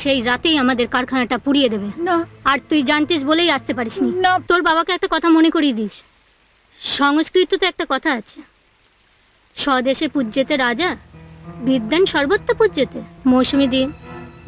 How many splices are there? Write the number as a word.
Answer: two